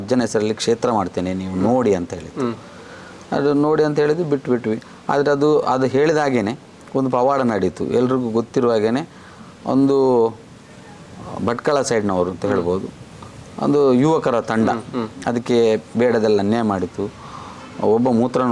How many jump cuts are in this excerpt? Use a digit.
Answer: 0